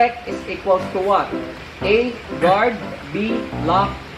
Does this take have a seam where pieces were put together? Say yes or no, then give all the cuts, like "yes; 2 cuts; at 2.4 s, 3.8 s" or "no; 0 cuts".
no; 0 cuts